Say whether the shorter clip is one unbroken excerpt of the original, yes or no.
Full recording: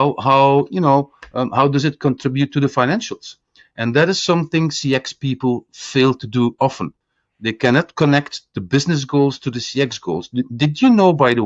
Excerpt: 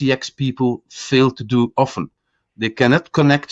yes